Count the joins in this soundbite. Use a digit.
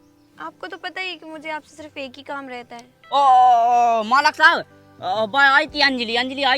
1